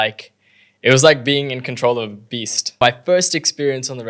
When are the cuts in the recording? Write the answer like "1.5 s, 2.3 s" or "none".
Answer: 2.8 s